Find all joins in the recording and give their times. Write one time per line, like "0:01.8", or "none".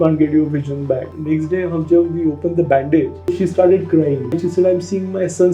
0:01.1
0:03.3
0:04.4